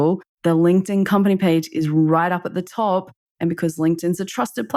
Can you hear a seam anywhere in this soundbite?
no; 0 cuts

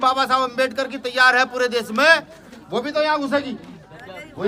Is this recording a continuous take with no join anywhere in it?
yes; 0 cuts

